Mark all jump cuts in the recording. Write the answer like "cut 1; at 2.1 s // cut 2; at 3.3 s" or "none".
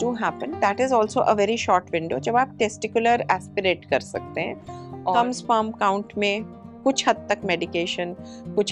cut 1; at 5.2 s

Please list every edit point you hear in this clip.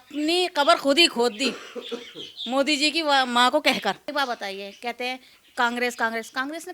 cut 1; at 4.1 s

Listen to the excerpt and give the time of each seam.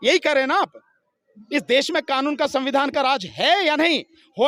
none

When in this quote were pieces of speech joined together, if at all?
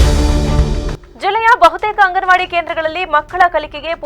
cut 1; at 1.0 s

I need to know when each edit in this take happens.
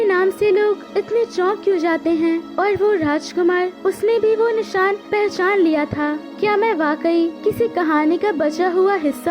cut 1; at 0.8 s // cut 2; at 2.5 s // cut 3; at 3.7 s // cut 4; at 5.0 s // cut 5; at 6.3 s // cut 6; at 7.4 s

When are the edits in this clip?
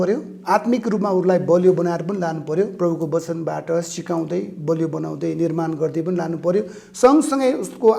none

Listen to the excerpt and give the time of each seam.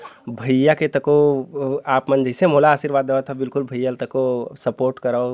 none

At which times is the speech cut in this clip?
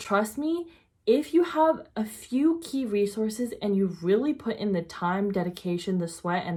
none

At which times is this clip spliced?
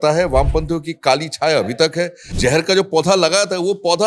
cut 1; at 2.2 s

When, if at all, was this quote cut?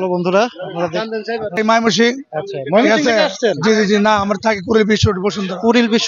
cut 1; at 1.6 s

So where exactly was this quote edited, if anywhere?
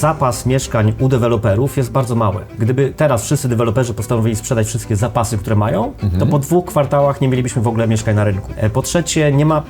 cut 1; at 2.5 s // cut 2; at 8.5 s

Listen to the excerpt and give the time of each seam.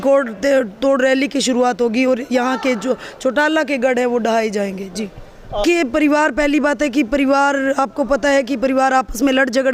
cut 1; at 5.6 s

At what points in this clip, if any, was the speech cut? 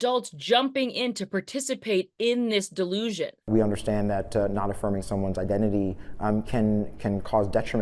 cut 1; at 3.3 s

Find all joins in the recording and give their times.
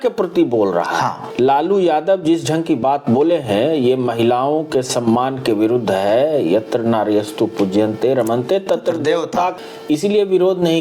cut 1; at 1.2 s // cut 2; at 9.5 s

